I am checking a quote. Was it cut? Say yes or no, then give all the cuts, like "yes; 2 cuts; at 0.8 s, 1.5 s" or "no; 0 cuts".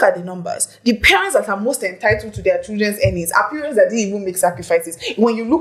no; 0 cuts